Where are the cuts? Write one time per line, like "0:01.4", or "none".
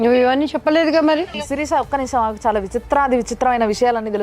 0:01.3

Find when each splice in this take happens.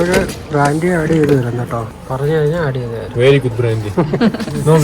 0:01.9

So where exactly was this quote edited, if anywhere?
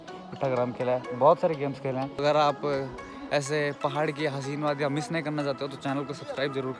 0:02.2

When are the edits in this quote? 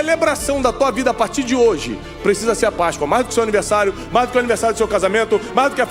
none

